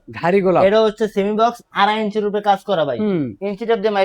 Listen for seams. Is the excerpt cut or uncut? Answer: uncut